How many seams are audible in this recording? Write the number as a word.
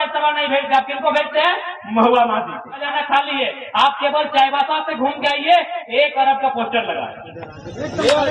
one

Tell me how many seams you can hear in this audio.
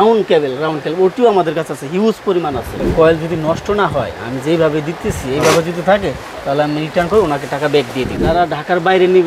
two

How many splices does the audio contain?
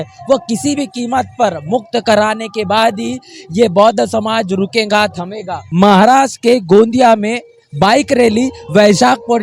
one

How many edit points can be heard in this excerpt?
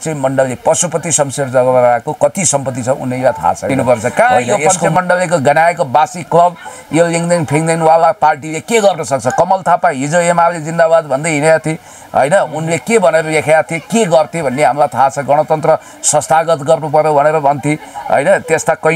one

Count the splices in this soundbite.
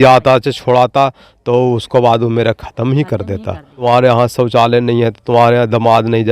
one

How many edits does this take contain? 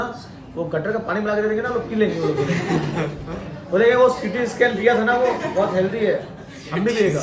zero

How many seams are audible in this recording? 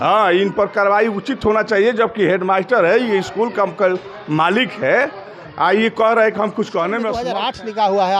one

